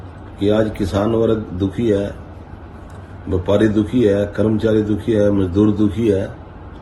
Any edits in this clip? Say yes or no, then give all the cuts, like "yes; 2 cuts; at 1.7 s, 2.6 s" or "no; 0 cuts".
no; 0 cuts